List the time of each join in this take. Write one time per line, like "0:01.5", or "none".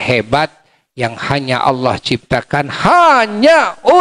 none